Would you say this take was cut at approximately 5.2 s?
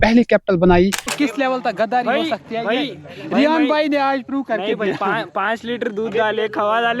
no; 1 cut; at 1.1 s

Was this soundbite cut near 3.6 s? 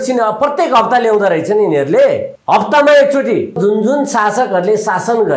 yes; 2 cuts; at 2.3 s, 3.6 s

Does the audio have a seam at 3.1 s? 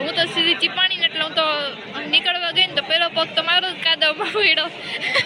no; 0 cuts

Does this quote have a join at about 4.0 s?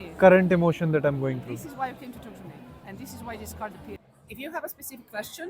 yes; 1 cut; at 4.0 s

